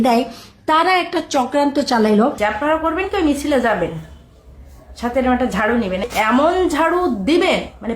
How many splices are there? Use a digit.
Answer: 2